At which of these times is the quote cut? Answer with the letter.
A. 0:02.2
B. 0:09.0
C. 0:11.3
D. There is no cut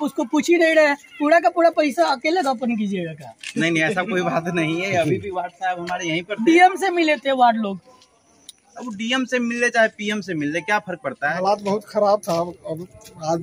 C